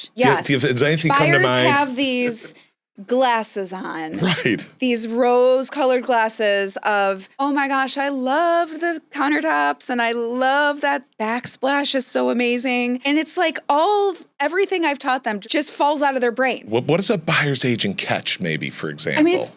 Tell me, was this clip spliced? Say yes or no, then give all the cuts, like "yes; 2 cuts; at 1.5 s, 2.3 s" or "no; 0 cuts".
no; 0 cuts